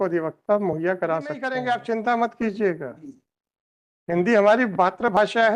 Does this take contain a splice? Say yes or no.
yes